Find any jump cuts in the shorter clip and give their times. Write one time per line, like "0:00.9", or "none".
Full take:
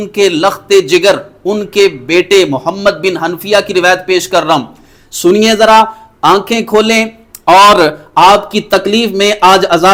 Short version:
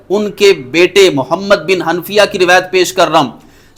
none